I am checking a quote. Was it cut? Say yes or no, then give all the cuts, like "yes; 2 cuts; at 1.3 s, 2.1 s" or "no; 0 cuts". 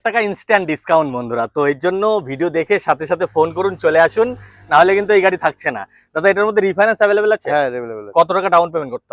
no; 0 cuts